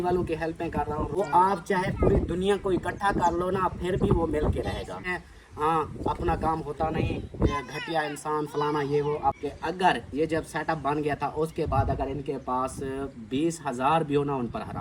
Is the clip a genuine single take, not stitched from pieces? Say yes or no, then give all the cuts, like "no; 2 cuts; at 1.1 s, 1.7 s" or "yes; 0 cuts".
no; 3 cuts; at 1.2 s, 5.0 s, 9.4 s